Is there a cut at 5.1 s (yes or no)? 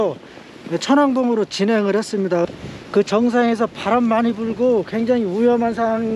no